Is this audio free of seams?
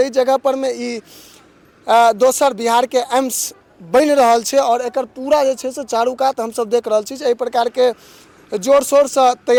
yes; 0 cuts

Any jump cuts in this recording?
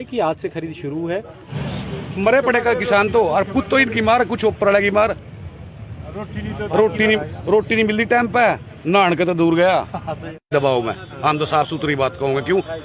yes; 2 cuts; at 1.4 s, 10.3 s

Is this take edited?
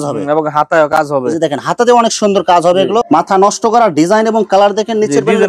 yes; 1 cut; at 3.0 s

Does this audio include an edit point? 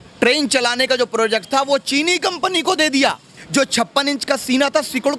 yes; 1 cut; at 3.4 s

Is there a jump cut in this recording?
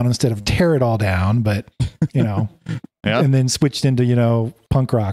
no; 0 cuts

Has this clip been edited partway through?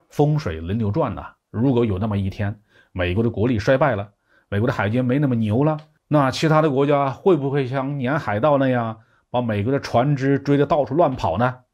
no; 0 cuts

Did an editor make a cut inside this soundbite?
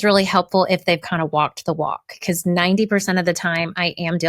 yes; 1 cut; at 2.1 s

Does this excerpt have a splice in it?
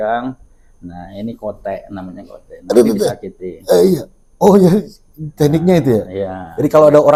no; 0 cuts

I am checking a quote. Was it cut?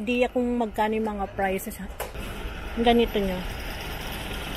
yes; 1 cut; at 2.1 s

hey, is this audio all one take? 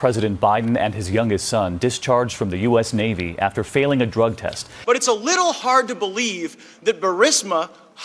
no; 1 cut; at 4.7 s

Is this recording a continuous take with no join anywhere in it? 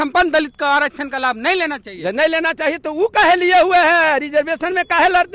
yes; 0 cuts

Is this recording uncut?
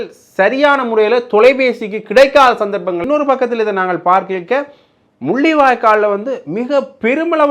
no; 1 cut; at 3.0 s

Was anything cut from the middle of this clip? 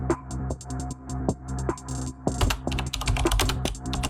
no; 0 cuts

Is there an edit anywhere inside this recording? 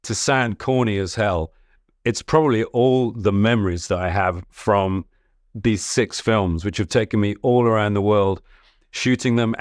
no; 0 cuts

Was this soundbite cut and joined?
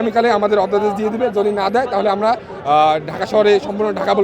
no; 0 cuts

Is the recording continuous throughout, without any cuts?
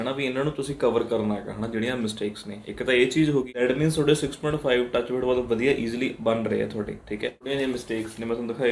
no; 2 cuts; at 3.5 s, 7.4 s

